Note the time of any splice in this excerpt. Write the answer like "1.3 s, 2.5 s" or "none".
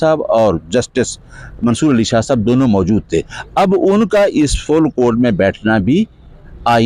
none